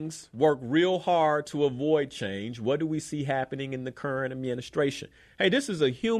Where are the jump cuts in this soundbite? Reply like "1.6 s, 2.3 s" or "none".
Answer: none